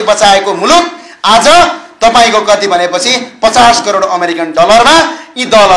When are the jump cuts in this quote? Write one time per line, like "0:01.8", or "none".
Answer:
none